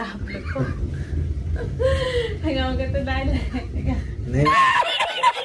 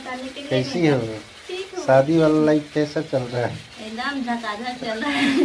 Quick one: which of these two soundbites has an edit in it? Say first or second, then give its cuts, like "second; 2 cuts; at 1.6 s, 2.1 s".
first; 1 cut; at 4.5 s